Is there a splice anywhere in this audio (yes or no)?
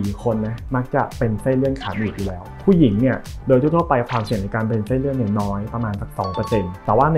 no